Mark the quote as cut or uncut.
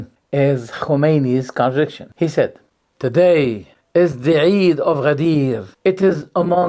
cut